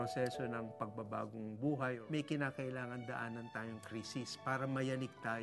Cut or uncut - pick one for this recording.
cut